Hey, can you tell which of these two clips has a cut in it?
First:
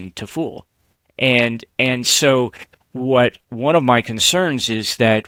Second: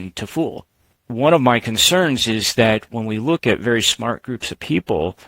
second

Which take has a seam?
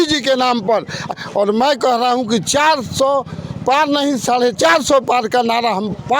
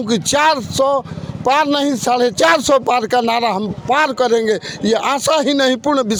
first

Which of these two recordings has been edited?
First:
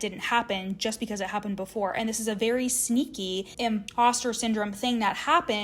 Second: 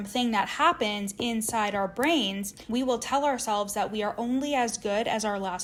first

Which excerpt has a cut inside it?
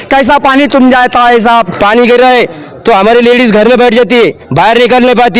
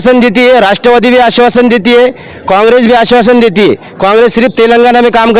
first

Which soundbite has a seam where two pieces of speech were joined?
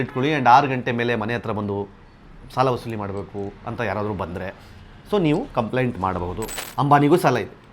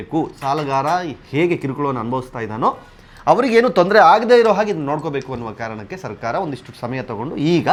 first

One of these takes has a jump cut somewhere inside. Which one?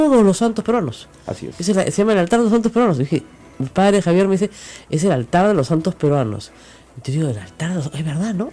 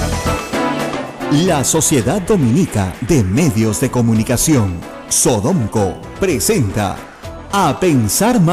second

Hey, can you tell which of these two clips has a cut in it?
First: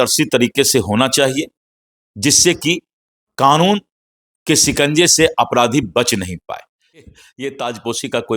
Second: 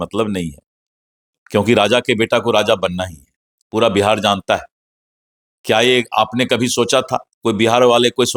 first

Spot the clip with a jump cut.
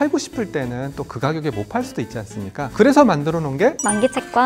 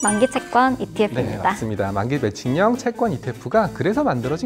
first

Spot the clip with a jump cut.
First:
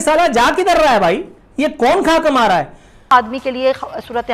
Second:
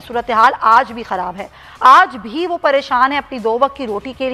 first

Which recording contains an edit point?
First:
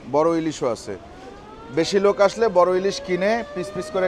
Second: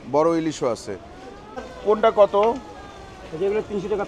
second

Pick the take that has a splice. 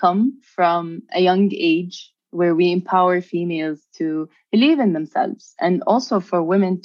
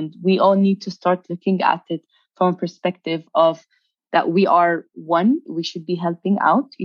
second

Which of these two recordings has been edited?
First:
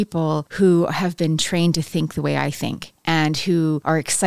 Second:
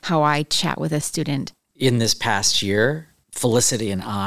second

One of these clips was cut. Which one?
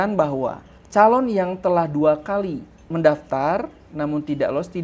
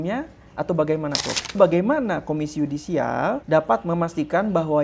second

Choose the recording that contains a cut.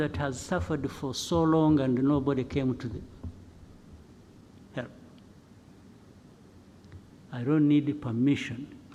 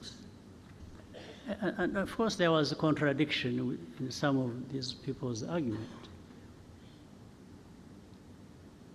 second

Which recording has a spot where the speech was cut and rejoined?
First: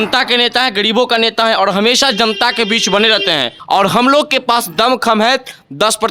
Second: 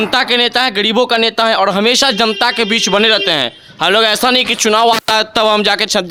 first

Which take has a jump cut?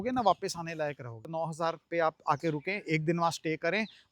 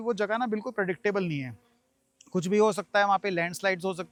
first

